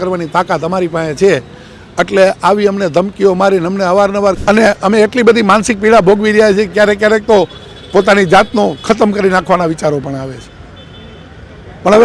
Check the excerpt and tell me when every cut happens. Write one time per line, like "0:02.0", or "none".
0:04.4